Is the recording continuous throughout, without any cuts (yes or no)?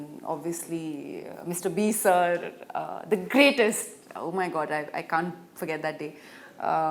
yes